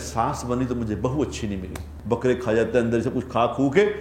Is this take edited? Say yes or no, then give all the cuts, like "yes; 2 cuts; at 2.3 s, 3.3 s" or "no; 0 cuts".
yes; 1 cut; at 1.9 s